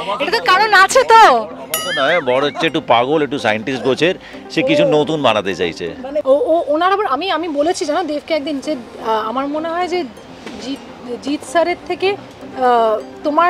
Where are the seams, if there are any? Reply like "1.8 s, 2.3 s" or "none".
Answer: 6.1 s